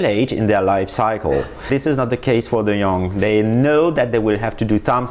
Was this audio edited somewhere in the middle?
no; 0 cuts

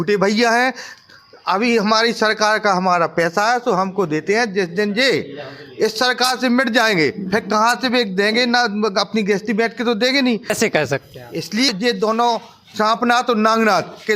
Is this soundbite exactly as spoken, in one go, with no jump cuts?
no; 2 cuts; at 10.5 s, 11.7 s

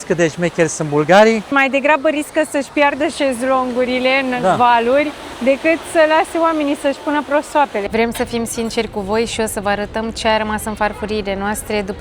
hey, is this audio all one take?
no; 2 cuts; at 1.5 s, 7.8 s

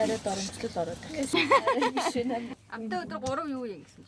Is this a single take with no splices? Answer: no; 2 cuts; at 1.3 s, 2.6 s

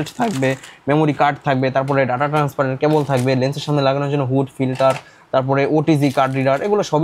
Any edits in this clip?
no; 0 cuts

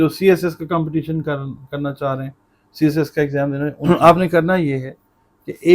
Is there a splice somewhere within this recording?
yes; 1 cut; at 3.8 s

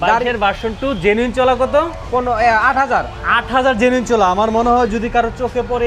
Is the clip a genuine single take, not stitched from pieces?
yes; 0 cuts

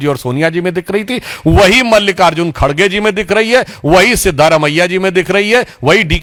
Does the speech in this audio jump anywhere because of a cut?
no; 0 cuts

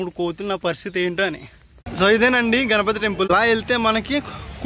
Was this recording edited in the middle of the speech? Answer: yes; 2 cuts; at 1.8 s, 3.3 s

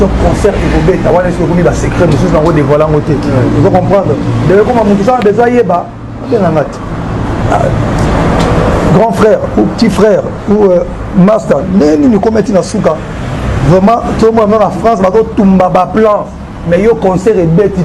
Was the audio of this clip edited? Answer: no; 0 cuts

